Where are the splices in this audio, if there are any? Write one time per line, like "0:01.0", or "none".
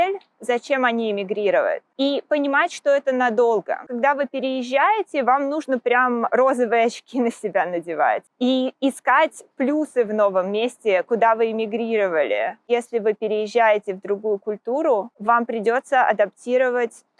0:03.9
0:12.7